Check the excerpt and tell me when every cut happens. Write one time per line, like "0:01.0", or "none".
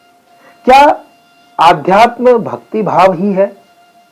none